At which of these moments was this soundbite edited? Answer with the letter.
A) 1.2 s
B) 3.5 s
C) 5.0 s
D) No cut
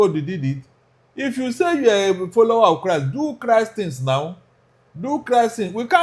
D